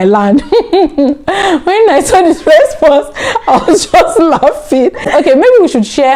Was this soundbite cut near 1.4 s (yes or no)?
no